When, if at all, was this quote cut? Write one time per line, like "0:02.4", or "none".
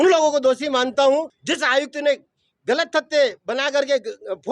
0:01.4